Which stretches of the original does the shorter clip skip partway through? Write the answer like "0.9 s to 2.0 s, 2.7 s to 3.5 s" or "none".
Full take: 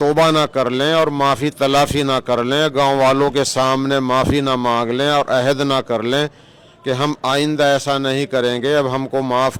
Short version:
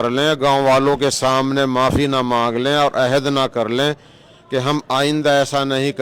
none